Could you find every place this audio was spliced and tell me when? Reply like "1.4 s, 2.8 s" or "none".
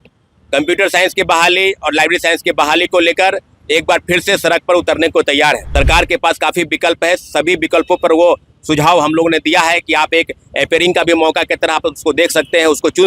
5.7 s